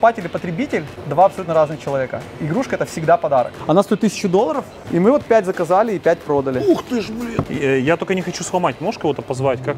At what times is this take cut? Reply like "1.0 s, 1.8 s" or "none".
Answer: 1.0 s, 3.6 s, 4.7 s, 7.5 s